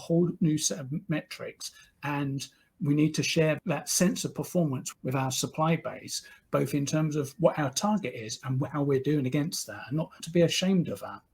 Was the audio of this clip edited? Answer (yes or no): yes